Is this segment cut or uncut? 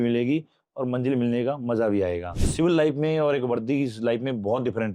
cut